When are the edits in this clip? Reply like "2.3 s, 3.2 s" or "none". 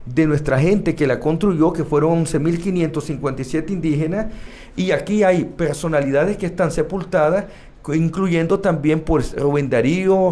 4.5 s